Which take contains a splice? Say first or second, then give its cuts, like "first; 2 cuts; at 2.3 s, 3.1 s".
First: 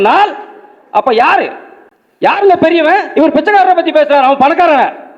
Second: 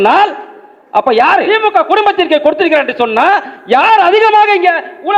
second; 1 cut; at 1.4 s